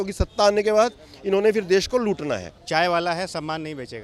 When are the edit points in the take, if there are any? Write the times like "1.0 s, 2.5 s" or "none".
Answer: 2.5 s